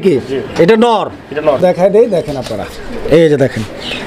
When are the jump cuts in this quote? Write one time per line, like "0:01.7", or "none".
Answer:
0:01.6